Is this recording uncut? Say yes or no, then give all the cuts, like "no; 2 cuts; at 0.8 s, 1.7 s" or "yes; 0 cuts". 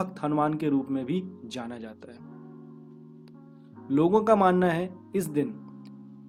yes; 0 cuts